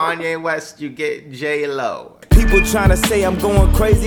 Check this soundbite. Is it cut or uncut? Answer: cut